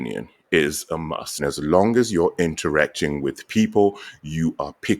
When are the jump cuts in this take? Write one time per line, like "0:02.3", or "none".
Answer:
0:01.4

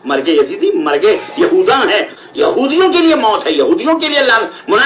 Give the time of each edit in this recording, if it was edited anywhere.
0:02.1

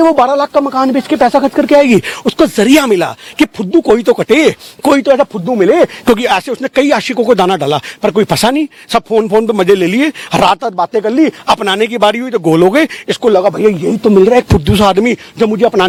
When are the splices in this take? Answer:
none

